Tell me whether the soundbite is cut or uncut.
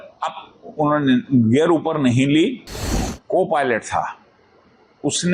cut